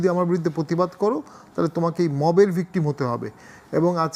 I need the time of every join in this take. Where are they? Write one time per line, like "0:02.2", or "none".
none